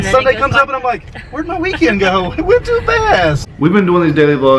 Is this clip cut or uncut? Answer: cut